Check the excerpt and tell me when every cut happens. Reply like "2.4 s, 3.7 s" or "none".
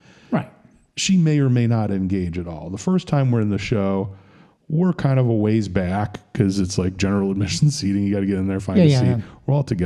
none